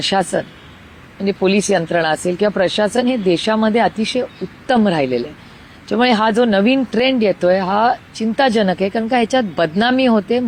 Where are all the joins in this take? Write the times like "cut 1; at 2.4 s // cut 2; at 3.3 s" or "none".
none